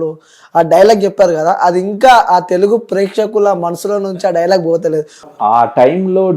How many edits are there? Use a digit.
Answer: 1